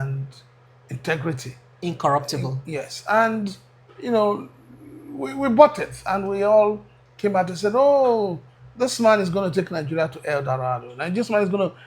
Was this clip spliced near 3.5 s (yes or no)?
no